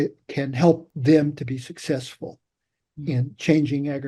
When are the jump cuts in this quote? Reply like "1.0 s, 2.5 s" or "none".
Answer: 0.9 s